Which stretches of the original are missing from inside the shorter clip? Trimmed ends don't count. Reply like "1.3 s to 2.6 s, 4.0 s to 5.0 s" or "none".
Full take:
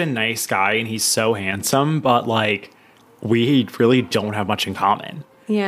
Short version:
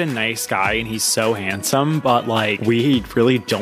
2.6 s to 3.2 s